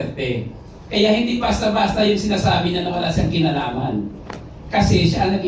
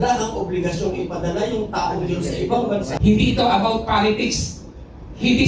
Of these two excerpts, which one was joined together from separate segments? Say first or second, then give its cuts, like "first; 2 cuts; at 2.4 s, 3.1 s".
second; 1 cut; at 2.9 s